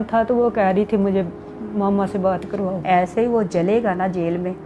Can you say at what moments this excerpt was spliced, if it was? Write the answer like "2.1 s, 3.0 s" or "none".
2.8 s